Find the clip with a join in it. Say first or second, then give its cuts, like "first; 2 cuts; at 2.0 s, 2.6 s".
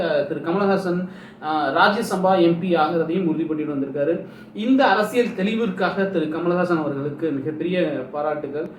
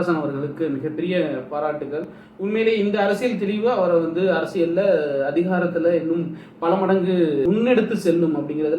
second; 1 cut; at 7.4 s